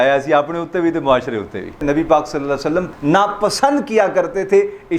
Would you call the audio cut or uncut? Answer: cut